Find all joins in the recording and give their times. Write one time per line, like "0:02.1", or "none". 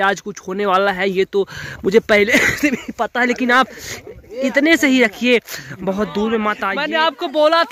0:06.7